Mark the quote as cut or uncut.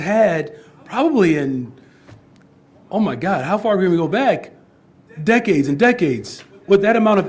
uncut